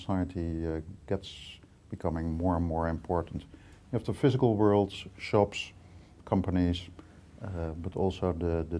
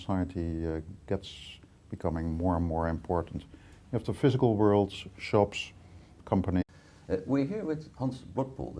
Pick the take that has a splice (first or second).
first